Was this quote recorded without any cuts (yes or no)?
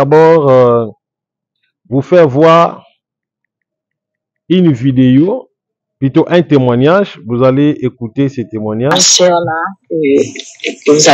no